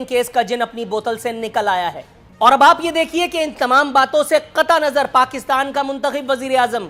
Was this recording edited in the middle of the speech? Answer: no; 0 cuts

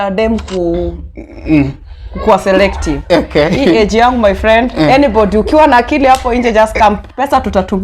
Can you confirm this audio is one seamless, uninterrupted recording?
yes; 0 cuts

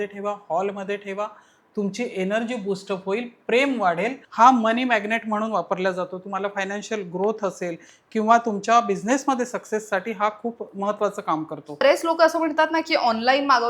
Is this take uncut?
no; 2 cuts; at 4.2 s, 11.8 s

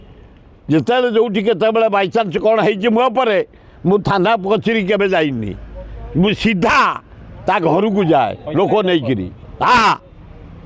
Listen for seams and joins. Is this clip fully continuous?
no; 1 cut; at 9.4 s

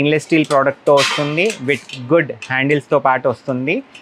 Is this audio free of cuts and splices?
yes; 0 cuts

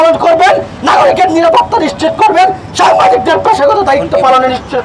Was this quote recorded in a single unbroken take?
yes; 0 cuts

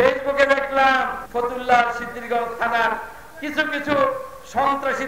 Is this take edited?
yes; 1 cut; at 1.2 s

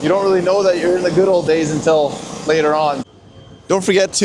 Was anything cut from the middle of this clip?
yes; 1 cut; at 3.0 s

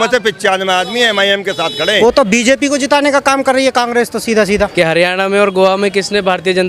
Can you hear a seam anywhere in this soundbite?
yes; 2 cuts; at 2.0 s, 4.7 s

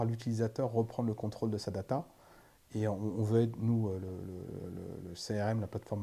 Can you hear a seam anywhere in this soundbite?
no; 0 cuts

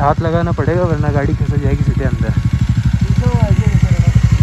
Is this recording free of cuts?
yes; 0 cuts

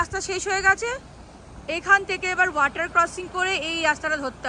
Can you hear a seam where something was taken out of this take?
no; 0 cuts

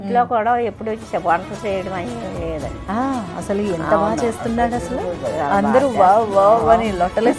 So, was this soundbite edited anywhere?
no; 0 cuts

